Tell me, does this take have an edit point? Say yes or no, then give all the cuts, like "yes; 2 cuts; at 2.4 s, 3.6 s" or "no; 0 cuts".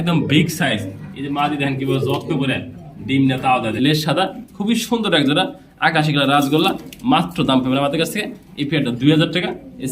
yes; 1 cut; at 3.7 s